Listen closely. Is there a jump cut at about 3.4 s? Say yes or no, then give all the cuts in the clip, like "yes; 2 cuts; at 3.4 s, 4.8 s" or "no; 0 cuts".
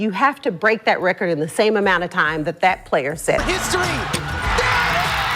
yes; 1 cut; at 3.4 s